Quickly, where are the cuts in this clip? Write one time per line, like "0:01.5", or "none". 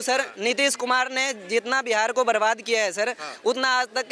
none